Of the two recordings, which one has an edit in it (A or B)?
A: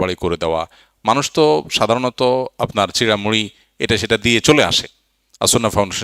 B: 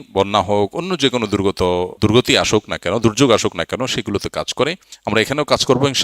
B